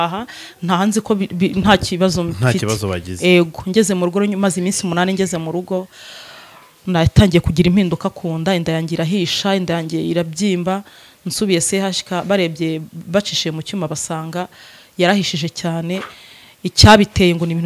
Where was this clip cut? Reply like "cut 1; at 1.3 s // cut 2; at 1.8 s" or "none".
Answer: none